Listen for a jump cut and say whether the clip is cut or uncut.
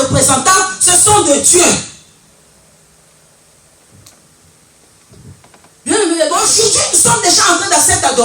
cut